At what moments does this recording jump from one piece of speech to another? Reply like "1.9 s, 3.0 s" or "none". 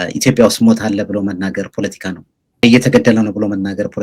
2.6 s